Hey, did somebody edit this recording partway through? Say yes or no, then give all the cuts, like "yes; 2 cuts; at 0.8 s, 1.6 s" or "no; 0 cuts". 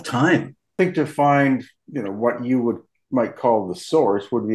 yes; 2 cuts; at 0.7 s, 1.8 s